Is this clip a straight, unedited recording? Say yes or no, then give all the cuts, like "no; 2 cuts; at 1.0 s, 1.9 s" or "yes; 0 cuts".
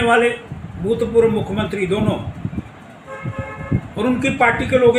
yes; 0 cuts